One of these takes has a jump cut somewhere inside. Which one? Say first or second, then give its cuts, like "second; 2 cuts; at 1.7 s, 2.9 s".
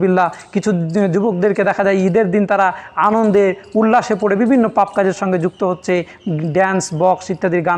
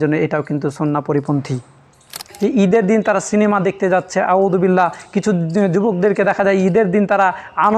second; 1 cut; at 2.3 s